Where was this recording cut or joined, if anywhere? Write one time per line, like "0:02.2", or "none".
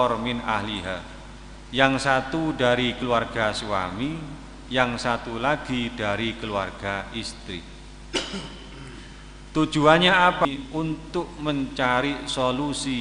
0:10.4